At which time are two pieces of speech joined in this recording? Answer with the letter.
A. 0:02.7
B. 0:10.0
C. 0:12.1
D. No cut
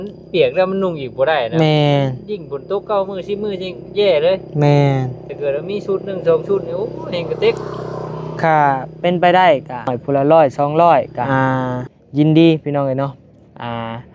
B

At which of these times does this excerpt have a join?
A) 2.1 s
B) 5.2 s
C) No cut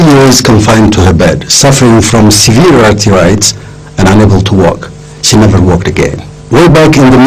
A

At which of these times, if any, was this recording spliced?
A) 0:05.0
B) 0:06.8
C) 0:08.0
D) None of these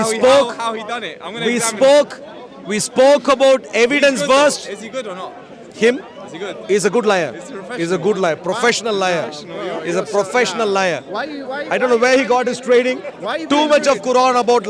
D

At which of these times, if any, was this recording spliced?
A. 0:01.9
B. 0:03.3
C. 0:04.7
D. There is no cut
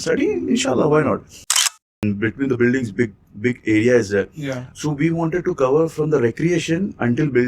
A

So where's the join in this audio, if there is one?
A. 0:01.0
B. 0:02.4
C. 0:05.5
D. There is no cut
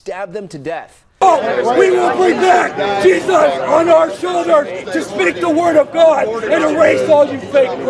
A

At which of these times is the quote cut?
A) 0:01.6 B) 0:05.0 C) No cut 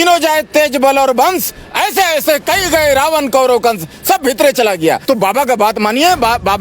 B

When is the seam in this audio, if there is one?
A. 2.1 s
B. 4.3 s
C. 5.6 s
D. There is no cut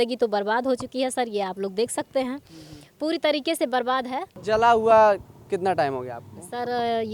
B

